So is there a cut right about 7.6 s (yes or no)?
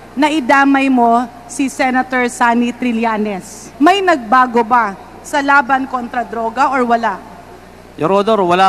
no